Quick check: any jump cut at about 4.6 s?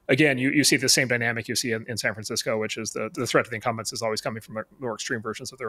no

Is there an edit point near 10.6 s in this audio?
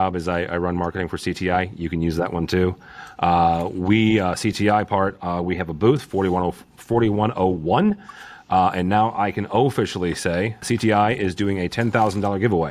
yes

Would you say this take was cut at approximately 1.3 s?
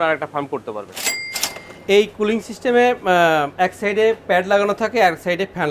yes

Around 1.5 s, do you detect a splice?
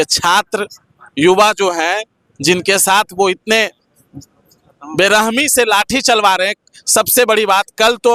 no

